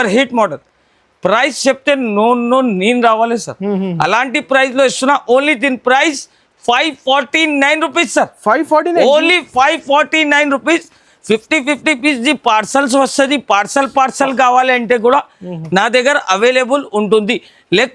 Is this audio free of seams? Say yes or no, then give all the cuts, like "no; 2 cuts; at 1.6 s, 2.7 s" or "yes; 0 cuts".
yes; 0 cuts